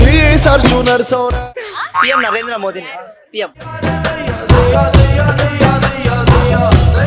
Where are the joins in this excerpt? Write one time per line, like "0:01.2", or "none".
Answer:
0:01.5